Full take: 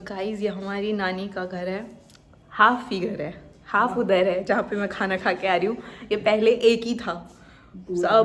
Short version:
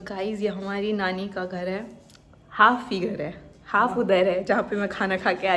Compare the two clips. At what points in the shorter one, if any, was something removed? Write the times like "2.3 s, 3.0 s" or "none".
none